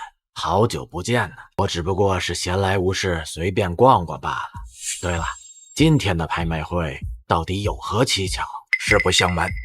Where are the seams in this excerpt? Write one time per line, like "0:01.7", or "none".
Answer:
0:01.4